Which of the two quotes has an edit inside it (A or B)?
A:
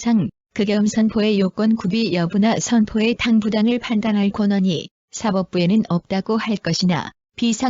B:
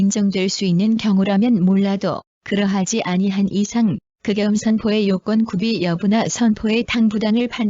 B